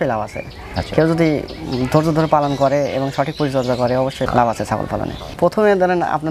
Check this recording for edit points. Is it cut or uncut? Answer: cut